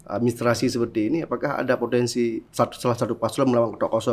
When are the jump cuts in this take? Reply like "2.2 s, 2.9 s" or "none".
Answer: 2.4 s